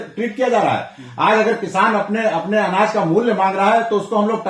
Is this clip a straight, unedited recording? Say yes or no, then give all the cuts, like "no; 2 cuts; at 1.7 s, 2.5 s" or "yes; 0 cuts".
yes; 0 cuts